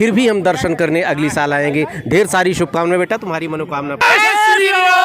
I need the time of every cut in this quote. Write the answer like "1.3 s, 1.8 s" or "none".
4.0 s